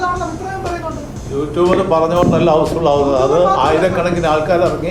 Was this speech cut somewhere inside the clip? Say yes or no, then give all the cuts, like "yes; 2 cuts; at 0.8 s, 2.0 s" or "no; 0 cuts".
yes; 1 cut; at 1.1 s